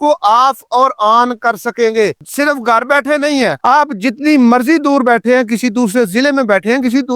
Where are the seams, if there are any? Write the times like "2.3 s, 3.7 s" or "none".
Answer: none